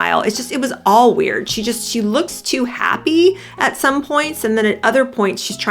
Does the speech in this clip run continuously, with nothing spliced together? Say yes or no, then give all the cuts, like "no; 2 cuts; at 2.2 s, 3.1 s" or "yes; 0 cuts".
yes; 0 cuts